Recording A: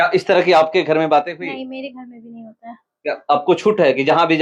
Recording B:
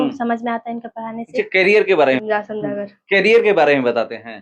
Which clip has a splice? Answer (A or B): B